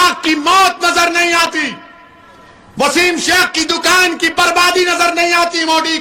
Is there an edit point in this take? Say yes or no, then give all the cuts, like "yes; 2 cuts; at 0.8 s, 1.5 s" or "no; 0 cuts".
no; 0 cuts